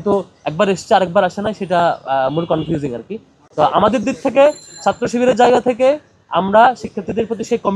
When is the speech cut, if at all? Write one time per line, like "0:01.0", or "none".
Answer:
none